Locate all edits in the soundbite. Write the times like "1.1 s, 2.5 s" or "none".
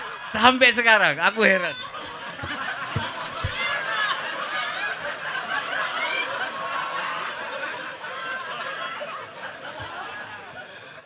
none